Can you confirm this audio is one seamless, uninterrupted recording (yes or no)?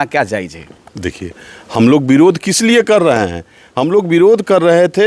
yes